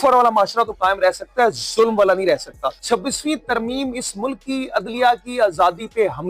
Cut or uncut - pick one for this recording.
cut